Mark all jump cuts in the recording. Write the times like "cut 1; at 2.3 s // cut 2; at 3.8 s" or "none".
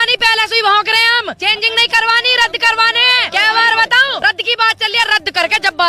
cut 1; at 1.3 s // cut 2; at 3.2 s // cut 3; at 4.2 s